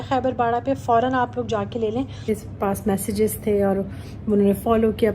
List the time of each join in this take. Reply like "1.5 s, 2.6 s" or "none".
2.2 s